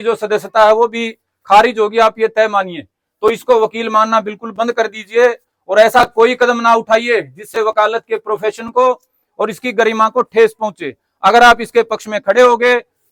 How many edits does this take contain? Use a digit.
0